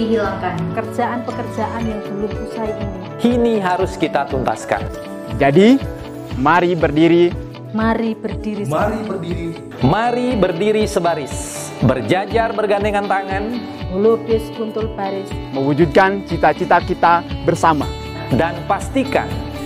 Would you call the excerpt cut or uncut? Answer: uncut